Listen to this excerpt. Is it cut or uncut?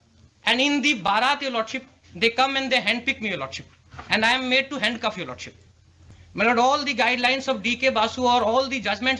uncut